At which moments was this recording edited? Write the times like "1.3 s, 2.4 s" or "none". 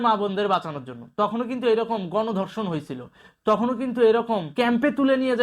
4.5 s